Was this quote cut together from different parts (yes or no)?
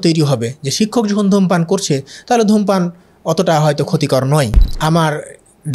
yes